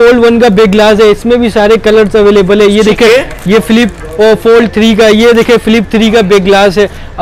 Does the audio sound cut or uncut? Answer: uncut